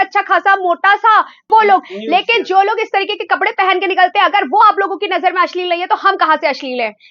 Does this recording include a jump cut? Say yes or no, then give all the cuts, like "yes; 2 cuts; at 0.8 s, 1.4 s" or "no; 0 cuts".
yes; 1 cut; at 1.4 s